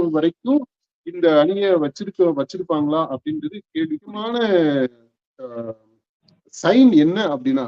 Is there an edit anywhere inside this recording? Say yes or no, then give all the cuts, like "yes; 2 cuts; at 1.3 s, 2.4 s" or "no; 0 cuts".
yes; 1 cut; at 4.2 s